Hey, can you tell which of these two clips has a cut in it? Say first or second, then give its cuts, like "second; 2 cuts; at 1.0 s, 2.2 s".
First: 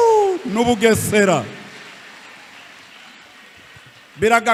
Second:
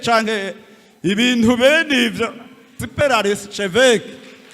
second; 1 cut; at 2.8 s